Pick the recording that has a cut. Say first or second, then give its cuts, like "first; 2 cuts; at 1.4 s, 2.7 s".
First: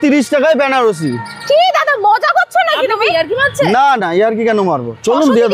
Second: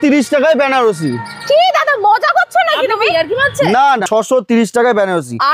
second; 1 cut; at 4.1 s